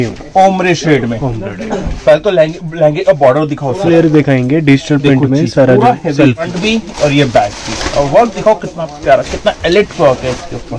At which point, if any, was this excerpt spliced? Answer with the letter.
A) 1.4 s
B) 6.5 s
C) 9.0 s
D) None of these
B